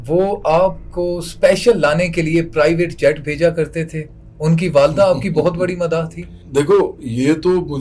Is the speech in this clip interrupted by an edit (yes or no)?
no